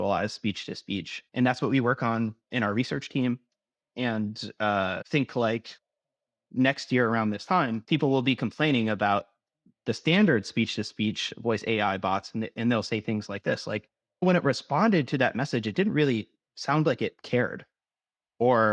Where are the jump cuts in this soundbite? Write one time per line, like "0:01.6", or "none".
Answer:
0:01.2
0:07.8
0:17.2